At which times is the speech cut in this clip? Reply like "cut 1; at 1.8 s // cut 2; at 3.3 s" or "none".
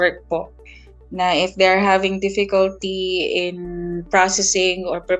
none

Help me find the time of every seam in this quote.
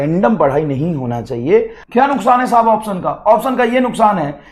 cut 1; at 1.8 s

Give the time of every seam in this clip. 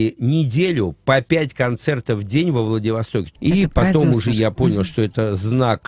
cut 1; at 3.3 s

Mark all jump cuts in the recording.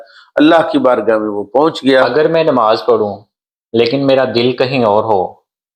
cut 1; at 2.1 s

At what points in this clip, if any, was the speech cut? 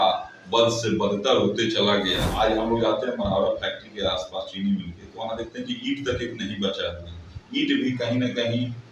cut 1; at 2.2 s

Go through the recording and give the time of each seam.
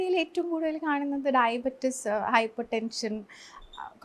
none

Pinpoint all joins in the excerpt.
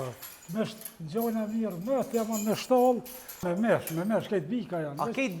cut 1; at 3.4 s

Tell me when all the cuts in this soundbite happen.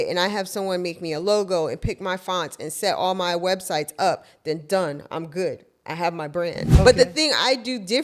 cut 1; at 6.6 s

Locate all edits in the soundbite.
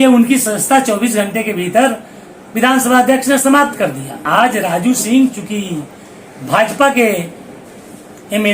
cut 1; at 4.2 s

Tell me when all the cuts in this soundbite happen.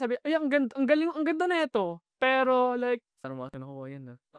cut 1; at 3.2 s

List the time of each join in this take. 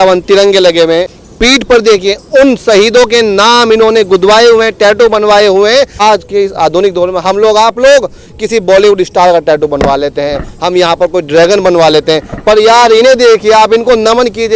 cut 1; at 1.1 s // cut 2; at 5.9 s

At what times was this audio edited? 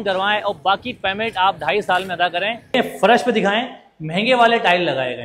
cut 1; at 2.7 s

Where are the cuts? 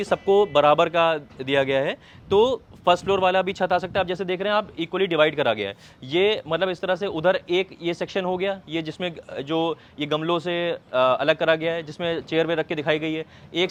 none

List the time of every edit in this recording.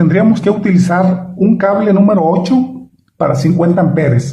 none

